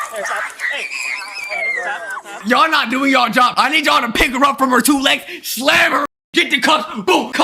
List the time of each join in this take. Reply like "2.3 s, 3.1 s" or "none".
2.4 s, 6.1 s